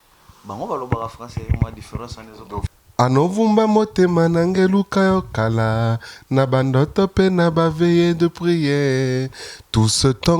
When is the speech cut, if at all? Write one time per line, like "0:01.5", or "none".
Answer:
0:02.6

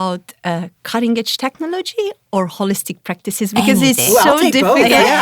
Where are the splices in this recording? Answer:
none

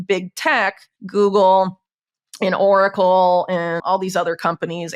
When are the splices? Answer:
0:00.9
0:03.8

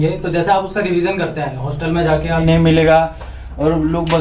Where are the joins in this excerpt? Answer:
0:02.4

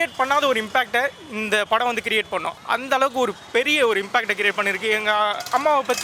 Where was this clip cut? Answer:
0:02.4

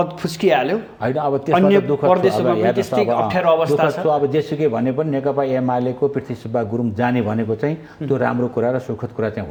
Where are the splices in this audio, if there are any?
none

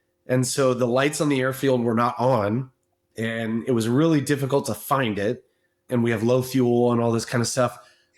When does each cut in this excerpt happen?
0:05.8

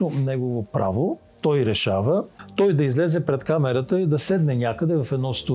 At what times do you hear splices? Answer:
0:02.4

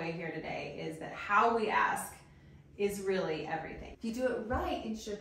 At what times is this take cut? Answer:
0:04.1

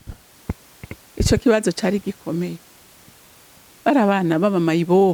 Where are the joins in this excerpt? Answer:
none

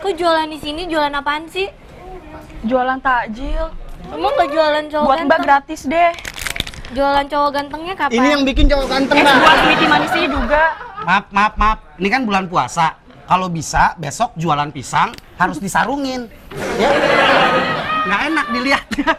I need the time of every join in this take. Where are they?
none

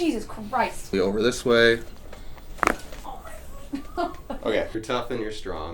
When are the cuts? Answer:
0:00.9
0:04.8

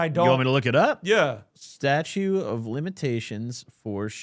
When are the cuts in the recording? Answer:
0:01.5

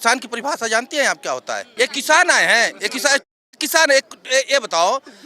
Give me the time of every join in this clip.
0:01.7

